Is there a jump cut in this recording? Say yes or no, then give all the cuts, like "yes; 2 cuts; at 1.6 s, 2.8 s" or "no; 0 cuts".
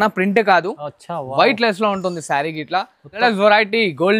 yes; 1 cut; at 3.2 s